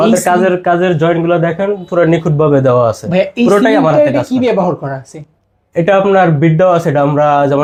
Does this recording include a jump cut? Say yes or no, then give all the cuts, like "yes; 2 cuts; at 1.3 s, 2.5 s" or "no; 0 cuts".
no; 0 cuts